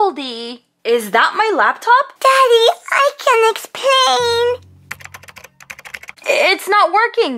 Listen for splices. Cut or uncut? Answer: uncut